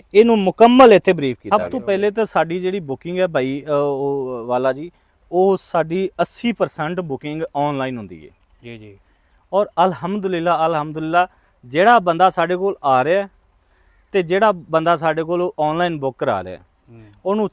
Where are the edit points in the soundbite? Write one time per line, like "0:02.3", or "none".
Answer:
0:01.4